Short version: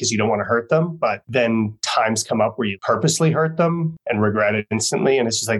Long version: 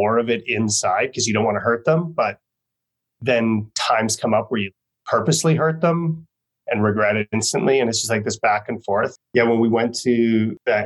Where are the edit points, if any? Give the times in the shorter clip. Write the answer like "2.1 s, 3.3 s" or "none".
1.2 s, 2.8 s, 4.0 s